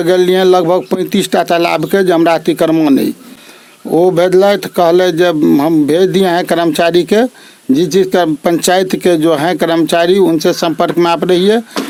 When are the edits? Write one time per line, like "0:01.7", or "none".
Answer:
none